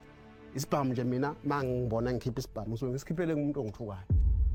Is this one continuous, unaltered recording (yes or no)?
yes